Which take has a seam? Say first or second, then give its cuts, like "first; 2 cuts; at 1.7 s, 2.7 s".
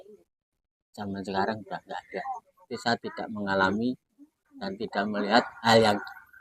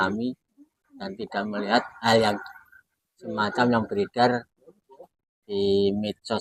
first; 1 cut; at 2.5 s